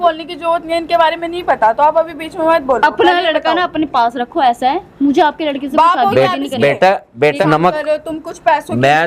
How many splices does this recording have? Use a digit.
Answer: 1